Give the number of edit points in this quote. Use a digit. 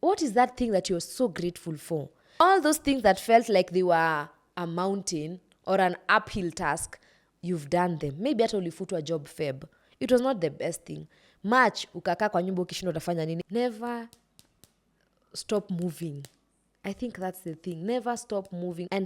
2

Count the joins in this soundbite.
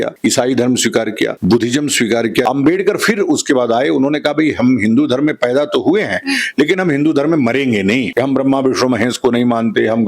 2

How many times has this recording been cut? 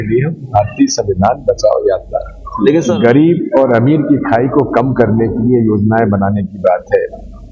1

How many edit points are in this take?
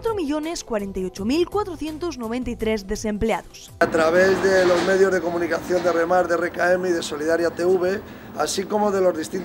1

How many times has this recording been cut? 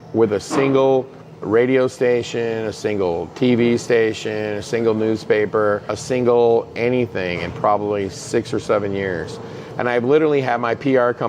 2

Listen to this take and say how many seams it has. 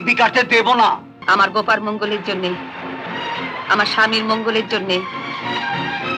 1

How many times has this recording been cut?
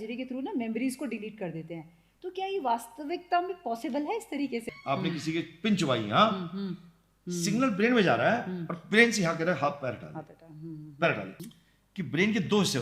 2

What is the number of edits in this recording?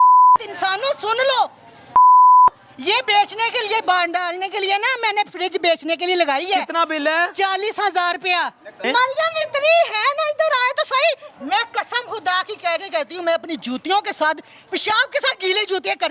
1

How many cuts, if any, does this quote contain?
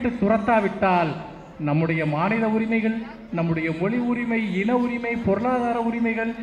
0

